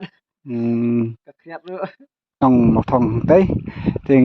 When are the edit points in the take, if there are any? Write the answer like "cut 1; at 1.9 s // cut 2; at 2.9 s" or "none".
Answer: cut 1; at 2.4 s